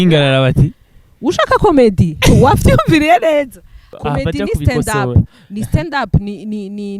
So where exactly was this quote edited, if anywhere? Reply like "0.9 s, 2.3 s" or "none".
3.8 s